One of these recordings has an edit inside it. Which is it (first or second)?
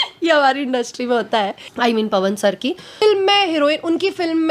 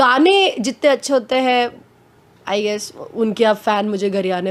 first